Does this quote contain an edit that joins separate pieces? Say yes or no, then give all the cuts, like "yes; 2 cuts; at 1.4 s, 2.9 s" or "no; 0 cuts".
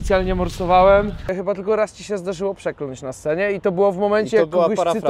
yes; 1 cut; at 1.3 s